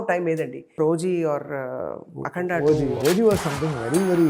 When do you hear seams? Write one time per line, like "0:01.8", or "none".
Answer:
0:00.8
0:03.0